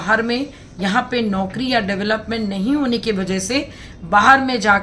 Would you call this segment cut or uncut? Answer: uncut